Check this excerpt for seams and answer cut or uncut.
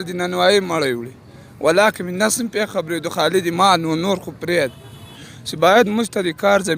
cut